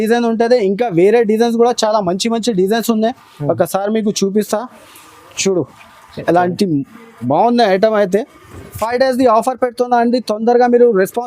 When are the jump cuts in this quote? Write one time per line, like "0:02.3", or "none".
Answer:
0:08.8